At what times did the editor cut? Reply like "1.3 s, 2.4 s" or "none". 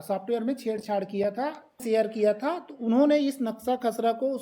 1.8 s